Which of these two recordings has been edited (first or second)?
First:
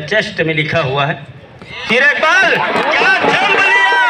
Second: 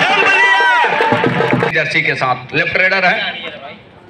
second